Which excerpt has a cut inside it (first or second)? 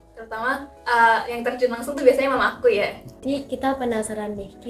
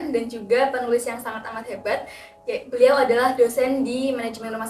first